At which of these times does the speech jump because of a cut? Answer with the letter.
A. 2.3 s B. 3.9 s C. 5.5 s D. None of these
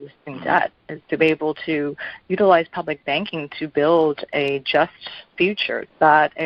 C